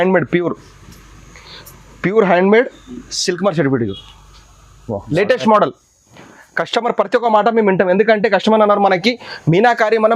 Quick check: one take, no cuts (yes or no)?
no